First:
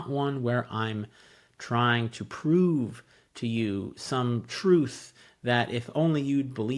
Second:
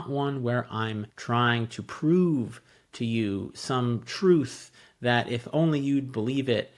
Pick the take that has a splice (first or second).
second